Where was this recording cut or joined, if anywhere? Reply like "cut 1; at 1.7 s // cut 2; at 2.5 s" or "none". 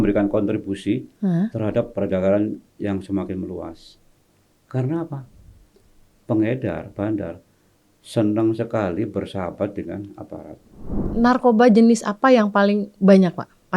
cut 1; at 11.1 s